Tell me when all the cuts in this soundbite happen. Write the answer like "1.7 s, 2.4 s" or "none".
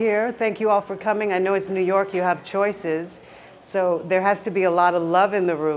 2.0 s